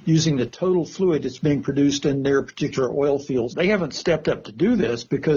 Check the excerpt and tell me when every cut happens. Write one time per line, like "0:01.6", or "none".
0:03.5